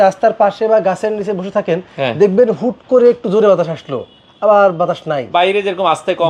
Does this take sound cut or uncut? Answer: uncut